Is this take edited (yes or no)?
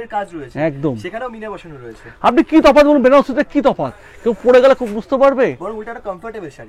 no